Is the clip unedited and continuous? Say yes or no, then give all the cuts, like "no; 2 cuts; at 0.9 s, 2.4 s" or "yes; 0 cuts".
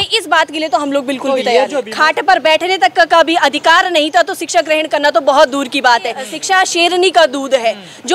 no; 2 cuts; at 1.8 s, 6.3 s